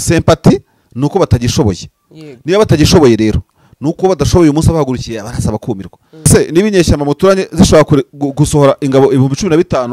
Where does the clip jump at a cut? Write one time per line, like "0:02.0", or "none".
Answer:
0:06.3